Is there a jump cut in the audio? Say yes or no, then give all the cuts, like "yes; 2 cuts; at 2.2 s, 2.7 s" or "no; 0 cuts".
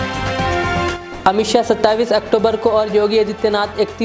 yes; 1 cut; at 1.0 s